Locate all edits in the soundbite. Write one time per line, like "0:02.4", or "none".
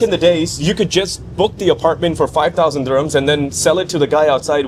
none